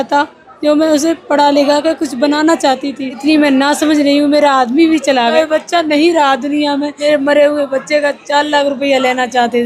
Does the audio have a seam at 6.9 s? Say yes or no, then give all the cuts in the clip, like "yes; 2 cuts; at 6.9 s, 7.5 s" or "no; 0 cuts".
yes; 3 cuts; at 3.2 s, 5.3 s, 6.9 s